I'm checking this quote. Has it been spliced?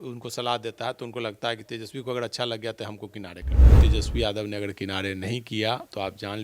yes; 1 cut; at 3.8 s

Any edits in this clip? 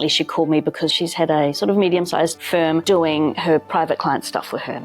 yes; 2 cuts; at 0.9 s, 2.4 s

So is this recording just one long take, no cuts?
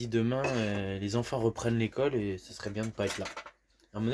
yes; 0 cuts

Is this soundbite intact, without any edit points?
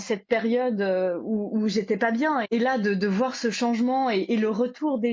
no; 1 cut; at 2.4 s

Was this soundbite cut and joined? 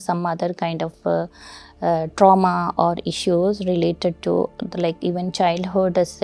no; 0 cuts

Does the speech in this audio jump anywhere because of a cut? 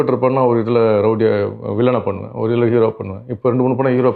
no; 0 cuts

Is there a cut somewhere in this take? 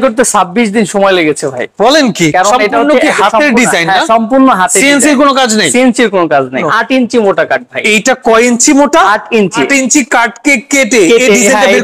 yes; 3 cuts; at 2.3 s, 6.6 s, 9.6 s

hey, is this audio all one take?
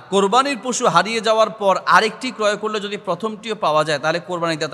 yes; 0 cuts

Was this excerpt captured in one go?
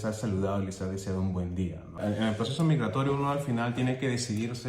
no; 1 cut; at 2.0 s

